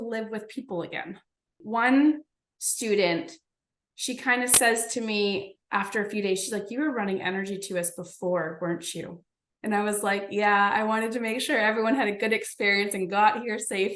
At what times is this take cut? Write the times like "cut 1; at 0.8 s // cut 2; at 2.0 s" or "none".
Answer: cut 1; at 1.6 s